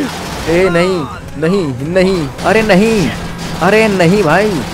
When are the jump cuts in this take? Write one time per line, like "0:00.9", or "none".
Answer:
0:02.3